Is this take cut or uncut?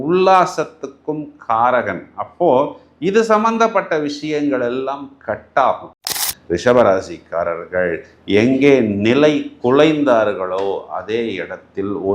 cut